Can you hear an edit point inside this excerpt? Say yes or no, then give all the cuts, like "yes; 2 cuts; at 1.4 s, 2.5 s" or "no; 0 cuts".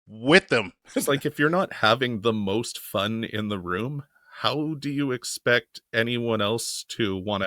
yes; 1 cut; at 1.0 s